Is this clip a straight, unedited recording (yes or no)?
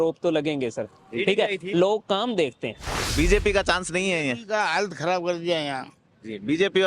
no